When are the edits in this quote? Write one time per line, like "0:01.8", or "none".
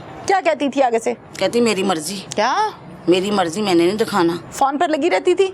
0:02.2
0:04.5

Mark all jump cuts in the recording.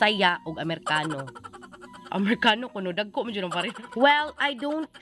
0:03.8

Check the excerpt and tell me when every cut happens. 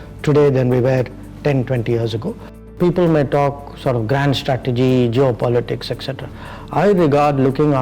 0:02.6

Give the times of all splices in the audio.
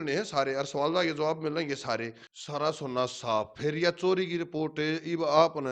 0:02.2

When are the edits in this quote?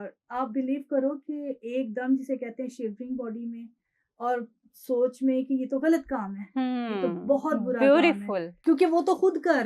0:08.5

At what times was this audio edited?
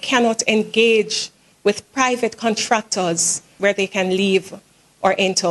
0:03.5

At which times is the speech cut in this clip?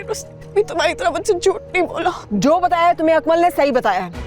0:02.2

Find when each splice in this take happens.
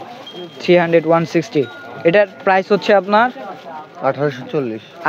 none

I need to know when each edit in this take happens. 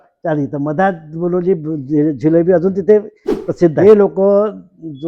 0:03.8

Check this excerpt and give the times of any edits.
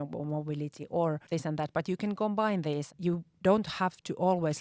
0:01.2
0:02.9

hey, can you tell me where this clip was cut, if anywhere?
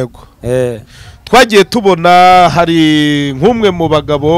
none

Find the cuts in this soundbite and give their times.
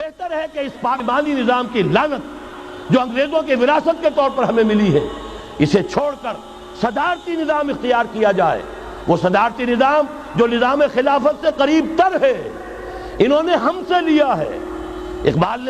0:01.0

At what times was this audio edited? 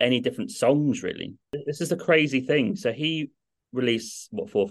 0:01.6

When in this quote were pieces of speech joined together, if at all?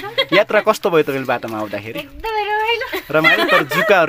none

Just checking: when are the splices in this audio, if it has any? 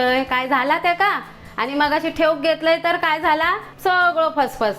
0:03.7

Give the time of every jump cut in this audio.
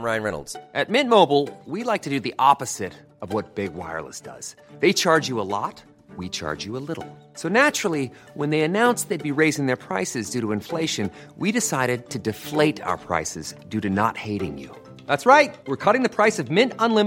none

